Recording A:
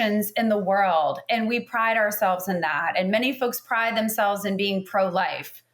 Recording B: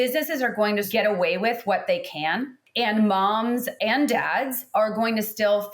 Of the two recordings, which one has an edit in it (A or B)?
B